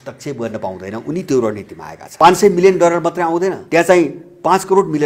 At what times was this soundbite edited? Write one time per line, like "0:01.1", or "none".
0:02.1
0:03.6